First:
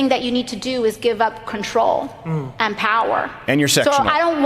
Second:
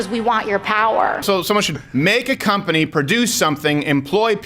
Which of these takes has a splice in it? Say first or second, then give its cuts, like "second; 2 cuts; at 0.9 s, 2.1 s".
second; 1 cut; at 1.2 s